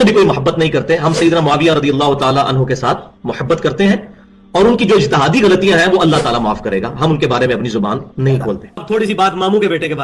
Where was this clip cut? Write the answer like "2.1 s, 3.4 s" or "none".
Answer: 8.7 s